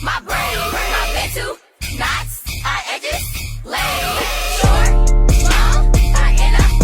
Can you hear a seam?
no; 0 cuts

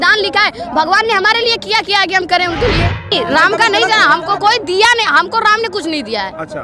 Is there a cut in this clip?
yes; 1 cut; at 3.1 s

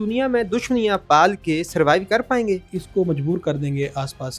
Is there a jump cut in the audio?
yes; 1 cut; at 2.8 s

